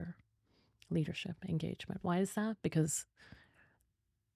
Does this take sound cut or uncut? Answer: uncut